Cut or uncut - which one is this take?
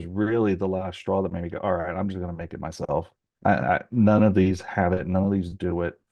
uncut